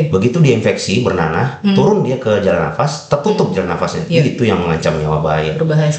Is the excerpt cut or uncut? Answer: uncut